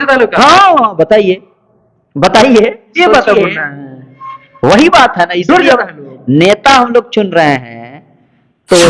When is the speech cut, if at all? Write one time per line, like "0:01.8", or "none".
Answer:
none

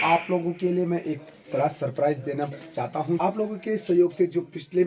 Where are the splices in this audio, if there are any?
0:03.2

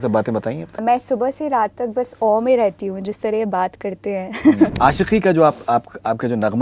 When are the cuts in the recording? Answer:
0:00.8
0:04.7

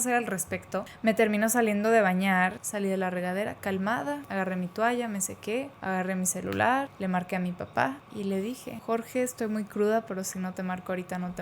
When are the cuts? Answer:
0:00.9
0:02.6
0:04.2
0:05.7
0:06.9
0:08.7

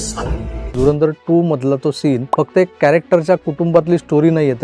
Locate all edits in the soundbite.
0:00.7
0:02.3

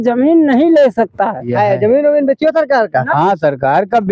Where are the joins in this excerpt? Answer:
0:01.5

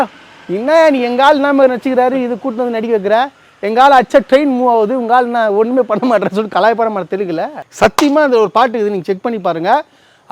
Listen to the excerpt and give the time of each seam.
0:07.6

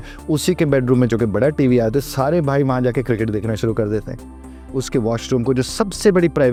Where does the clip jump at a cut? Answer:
none

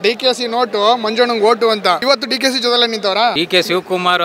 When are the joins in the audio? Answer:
0:02.0
0:03.4

